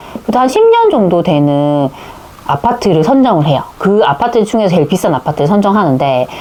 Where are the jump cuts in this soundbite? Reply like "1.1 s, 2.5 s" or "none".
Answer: none